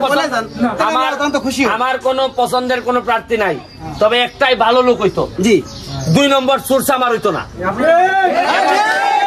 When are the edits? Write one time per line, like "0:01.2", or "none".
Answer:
none